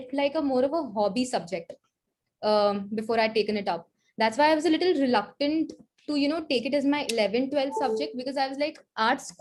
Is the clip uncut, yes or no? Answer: yes